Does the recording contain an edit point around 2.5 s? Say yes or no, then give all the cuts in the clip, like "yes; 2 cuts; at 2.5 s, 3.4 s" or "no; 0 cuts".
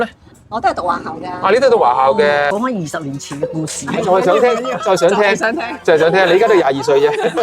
yes; 1 cut; at 2.5 s